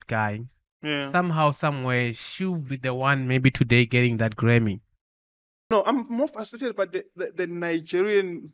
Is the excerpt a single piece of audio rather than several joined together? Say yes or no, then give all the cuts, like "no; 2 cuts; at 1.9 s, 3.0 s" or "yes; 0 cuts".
no; 1 cut; at 5.7 s